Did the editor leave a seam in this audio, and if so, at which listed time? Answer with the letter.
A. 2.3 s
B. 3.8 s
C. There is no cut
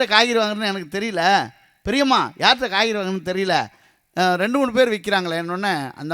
C